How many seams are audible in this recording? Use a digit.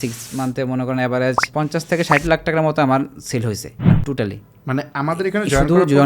2